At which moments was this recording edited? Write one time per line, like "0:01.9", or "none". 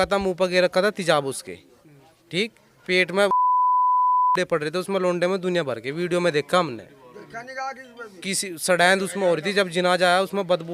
none